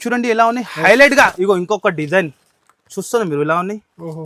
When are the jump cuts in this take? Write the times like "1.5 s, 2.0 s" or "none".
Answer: none